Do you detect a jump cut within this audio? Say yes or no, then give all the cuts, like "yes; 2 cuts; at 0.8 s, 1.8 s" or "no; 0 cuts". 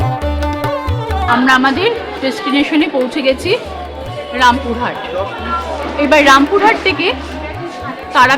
yes; 1 cut; at 1.3 s